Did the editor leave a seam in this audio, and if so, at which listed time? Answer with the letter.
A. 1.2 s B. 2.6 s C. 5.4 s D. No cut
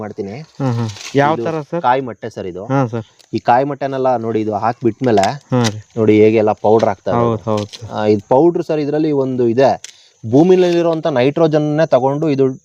D